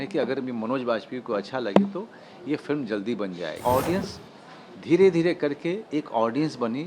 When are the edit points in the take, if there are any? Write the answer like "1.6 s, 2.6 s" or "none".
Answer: 3.6 s